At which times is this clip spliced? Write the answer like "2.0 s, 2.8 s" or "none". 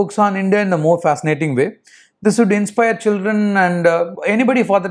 none